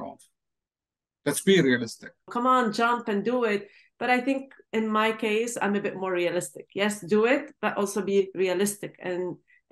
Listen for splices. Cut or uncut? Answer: cut